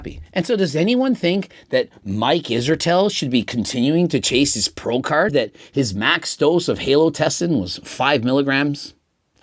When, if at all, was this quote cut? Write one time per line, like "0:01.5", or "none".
0:05.3

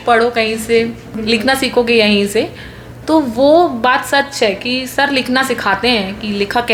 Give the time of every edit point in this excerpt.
none

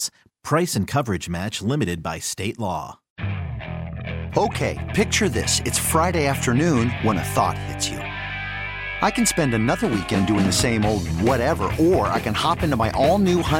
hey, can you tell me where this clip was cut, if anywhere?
0:03.0

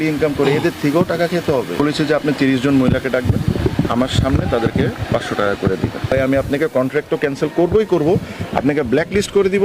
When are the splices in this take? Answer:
0:01.8
0:06.1

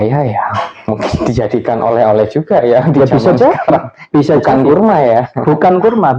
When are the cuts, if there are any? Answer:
none

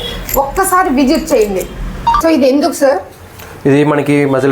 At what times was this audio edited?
0:02.2

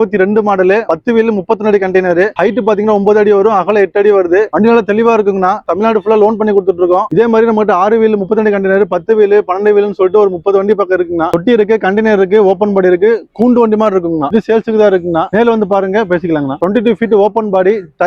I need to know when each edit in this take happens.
0:04.5
0:05.6
0:07.1
0:11.3
0:14.3
0:16.6

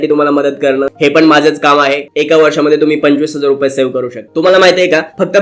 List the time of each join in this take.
0:00.9
0:02.1
0:04.3

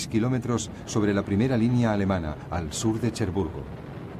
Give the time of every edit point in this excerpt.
0:03.0

